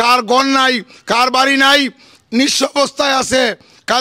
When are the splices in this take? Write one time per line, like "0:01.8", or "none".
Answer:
0:02.1